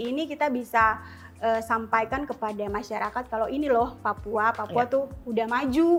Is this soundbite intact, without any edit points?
yes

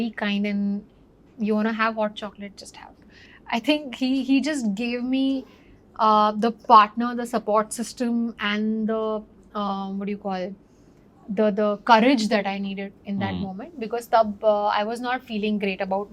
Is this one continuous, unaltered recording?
yes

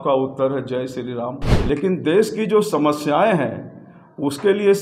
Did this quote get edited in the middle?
yes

